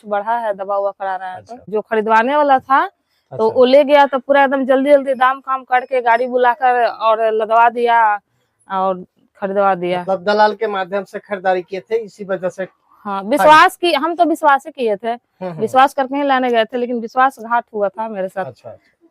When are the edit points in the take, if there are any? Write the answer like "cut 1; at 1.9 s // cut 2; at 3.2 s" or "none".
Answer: cut 1; at 1.6 s